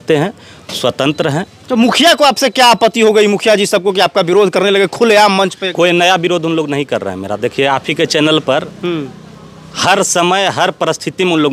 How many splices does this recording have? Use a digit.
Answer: 0